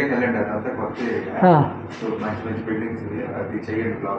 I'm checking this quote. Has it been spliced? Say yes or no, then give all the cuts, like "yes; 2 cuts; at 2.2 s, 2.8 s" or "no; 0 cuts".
no; 0 cuts